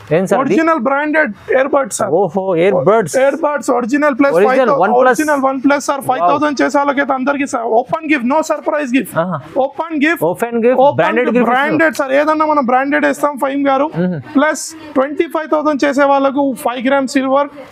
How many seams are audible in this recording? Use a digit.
0